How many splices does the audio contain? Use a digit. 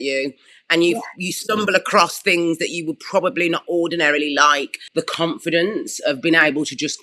1